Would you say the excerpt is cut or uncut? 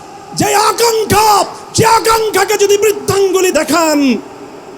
cut